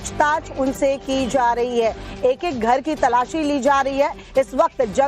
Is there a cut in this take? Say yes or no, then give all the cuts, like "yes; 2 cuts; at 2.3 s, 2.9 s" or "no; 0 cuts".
yes; 1 cut; at 1.3 s